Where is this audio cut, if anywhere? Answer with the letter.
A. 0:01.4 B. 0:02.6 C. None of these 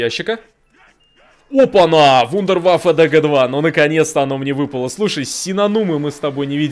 C